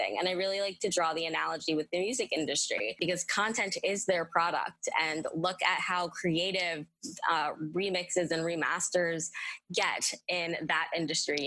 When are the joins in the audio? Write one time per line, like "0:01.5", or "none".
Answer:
0:03.0